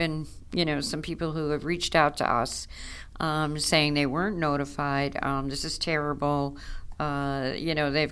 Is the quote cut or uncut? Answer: uncut